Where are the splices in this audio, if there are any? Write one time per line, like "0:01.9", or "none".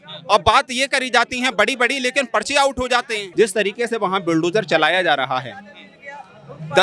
0:03.2